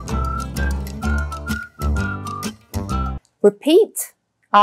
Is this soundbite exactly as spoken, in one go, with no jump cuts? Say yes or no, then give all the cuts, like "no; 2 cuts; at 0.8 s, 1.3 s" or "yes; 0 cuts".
no; 1 cut; at 3.2 s